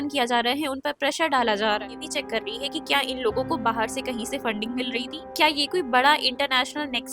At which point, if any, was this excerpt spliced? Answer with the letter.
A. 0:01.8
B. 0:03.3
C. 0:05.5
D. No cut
A